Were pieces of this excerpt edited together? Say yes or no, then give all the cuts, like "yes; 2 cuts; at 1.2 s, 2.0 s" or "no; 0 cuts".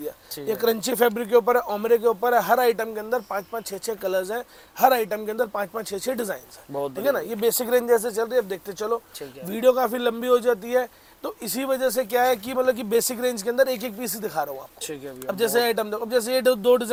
no; 0 cuts